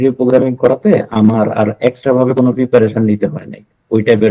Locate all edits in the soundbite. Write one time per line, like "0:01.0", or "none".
none